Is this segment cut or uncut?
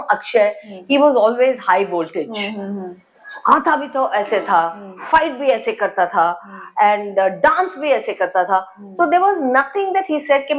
uncut